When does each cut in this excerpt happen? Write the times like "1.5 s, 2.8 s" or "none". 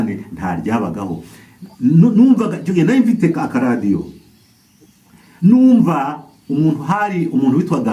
none